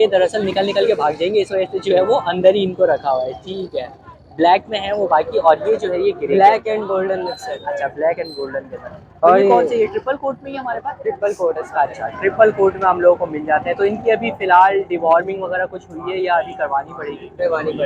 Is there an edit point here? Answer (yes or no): no